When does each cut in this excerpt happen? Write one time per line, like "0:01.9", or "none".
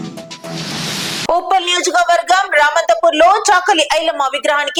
none